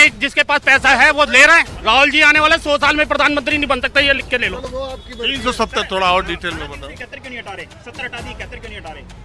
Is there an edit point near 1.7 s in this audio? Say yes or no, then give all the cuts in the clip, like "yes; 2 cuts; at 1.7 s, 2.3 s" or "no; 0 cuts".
yes; 2 cuts; at 1.7 s, 4.6 s